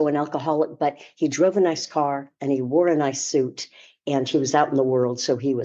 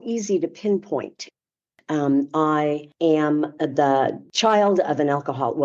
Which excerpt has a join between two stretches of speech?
second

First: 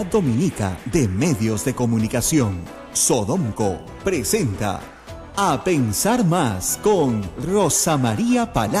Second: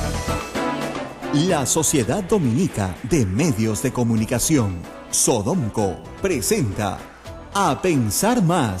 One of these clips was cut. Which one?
second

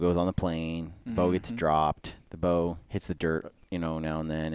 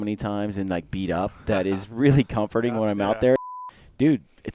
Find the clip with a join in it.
second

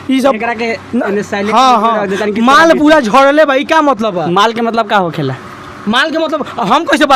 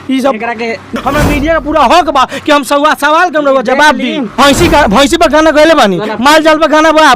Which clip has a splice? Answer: second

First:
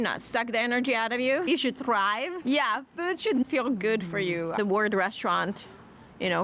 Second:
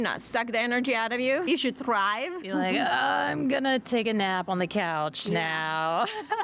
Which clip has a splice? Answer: first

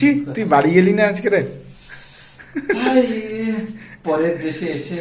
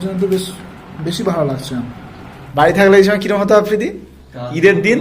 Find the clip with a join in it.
second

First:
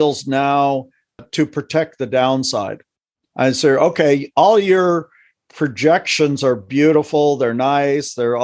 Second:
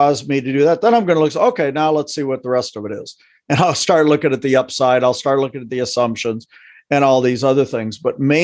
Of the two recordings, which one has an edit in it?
first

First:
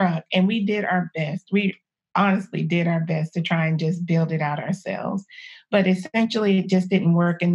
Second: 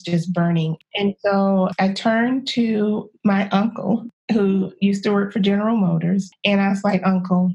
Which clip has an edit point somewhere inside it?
second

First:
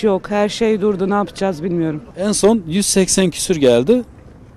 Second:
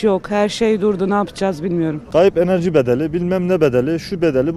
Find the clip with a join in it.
second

